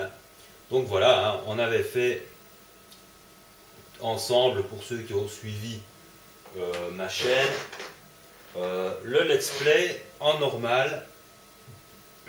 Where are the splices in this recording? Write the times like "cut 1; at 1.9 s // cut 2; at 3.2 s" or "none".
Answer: cut 1; at 5.7 s